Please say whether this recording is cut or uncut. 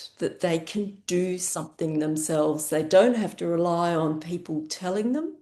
uncut